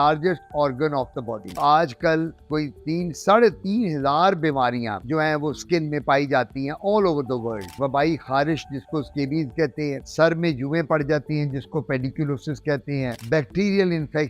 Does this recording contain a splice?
yes; 2 cuts; at 1.5 s, 7.7 s

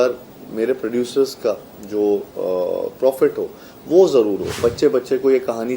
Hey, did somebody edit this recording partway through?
yes; 1 cut; at 4.6 s

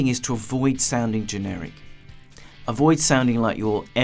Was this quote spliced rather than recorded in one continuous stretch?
no; 0 cuts

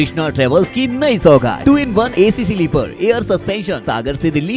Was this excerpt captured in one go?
no; 2 cuts; at 1.7 s, 3.8 s

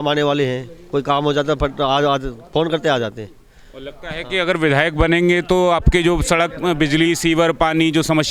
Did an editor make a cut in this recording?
no; 0 cuts

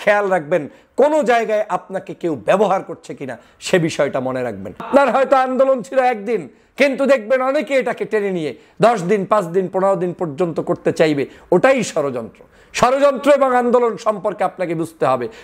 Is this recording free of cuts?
no; 1 cut; at 4.9 s

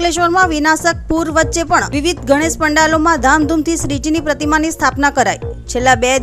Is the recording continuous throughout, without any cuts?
yes; 0 cuts

